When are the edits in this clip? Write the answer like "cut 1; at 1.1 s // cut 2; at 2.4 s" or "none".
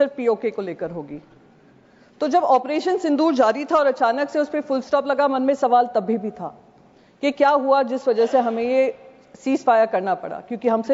none